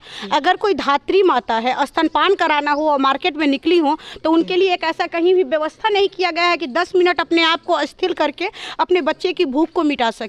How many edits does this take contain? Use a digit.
0